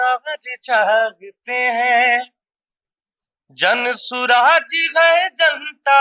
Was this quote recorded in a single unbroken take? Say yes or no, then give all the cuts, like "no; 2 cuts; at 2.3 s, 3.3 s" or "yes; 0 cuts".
yes; 0 cuts